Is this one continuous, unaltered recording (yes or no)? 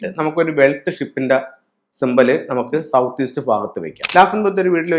no